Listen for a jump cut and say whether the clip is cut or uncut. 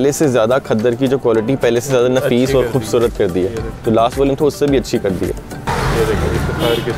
cut